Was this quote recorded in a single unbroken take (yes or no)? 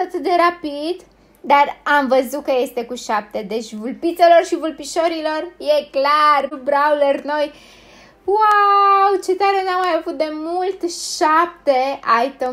no